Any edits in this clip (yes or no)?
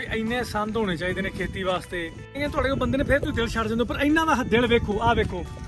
yes